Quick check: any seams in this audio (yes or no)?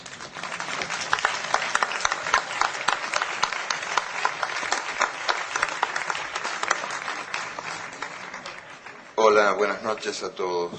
no